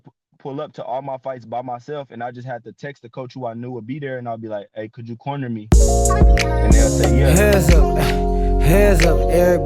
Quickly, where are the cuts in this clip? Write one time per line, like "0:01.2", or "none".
0:05.6

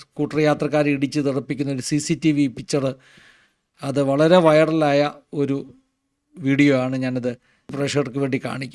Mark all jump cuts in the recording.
0:07.7

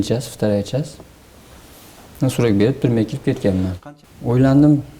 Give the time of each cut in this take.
0:03.8

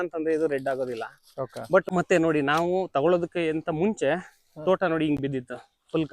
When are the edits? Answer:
0:01.9

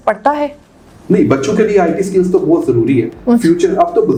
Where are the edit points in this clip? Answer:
none

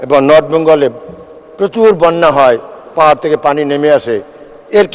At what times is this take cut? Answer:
none

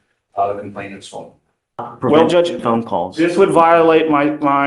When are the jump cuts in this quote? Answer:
0:01.9

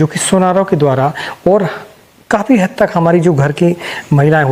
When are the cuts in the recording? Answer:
none

